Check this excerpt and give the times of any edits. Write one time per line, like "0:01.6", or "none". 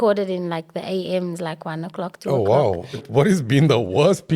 0:03.0